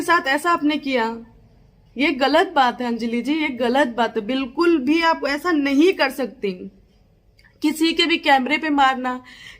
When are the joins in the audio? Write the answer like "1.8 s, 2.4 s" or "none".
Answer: 2.9 s